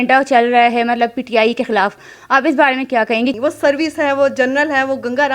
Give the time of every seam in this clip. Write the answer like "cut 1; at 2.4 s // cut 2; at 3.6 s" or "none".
cut 1; at 3.4 s